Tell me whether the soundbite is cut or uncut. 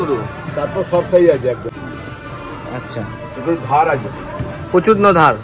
cut